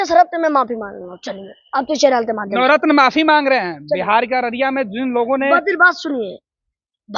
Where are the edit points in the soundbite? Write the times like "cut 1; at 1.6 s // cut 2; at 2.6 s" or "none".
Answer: none

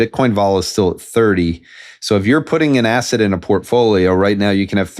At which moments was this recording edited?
none

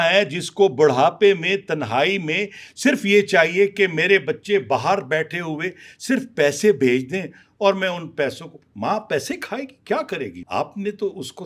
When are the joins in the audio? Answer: cut 1; at 10.4 s

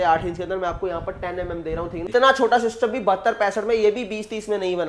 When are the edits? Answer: cut 1; at 2.1 s

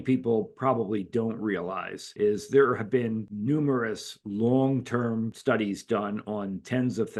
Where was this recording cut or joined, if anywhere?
none

